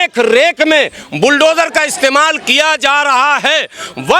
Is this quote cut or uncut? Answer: uncut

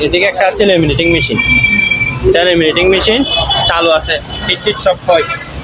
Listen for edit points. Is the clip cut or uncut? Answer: uncut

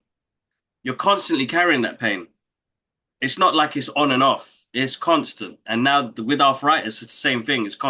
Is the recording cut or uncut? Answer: uncut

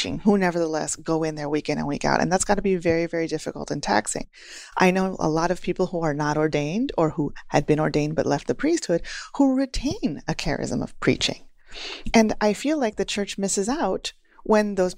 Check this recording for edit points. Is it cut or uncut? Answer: uncut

